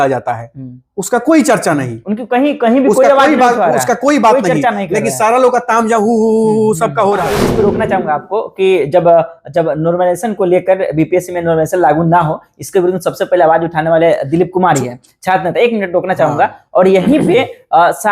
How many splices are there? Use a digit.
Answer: 1